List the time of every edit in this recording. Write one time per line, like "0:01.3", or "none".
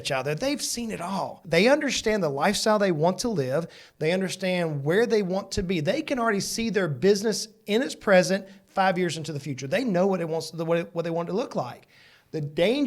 0:01.4